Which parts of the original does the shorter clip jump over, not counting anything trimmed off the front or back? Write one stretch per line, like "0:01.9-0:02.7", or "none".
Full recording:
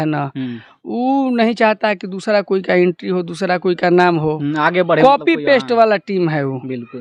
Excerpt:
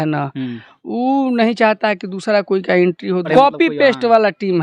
0:03.3-0:05.0